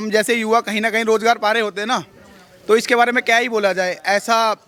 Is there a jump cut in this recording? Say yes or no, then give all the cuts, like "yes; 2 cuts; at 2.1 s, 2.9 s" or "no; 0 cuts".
no; 0 cuts